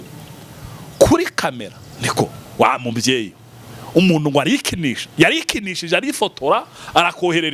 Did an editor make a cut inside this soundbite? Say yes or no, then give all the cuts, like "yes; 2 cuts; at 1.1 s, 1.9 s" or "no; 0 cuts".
no; 0 cuts